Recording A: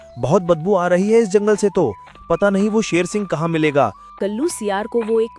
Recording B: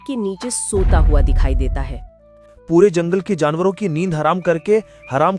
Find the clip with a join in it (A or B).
A